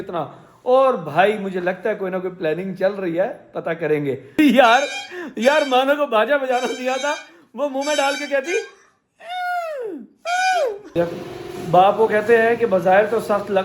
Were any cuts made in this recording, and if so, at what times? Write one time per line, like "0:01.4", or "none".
0:04.3
0:11.0